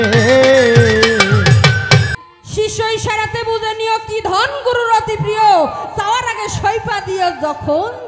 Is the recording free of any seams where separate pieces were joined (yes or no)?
no